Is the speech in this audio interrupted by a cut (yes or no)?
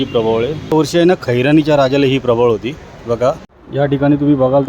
yes